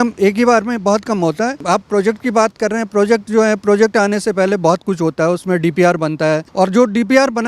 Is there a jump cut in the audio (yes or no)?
yes